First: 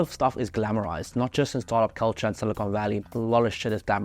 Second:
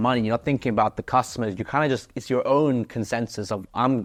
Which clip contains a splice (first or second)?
first